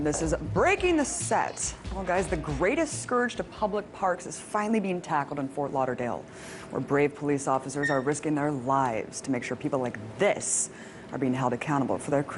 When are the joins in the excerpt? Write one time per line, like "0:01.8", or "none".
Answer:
none